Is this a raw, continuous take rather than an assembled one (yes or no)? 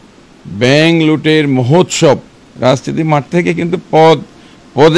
no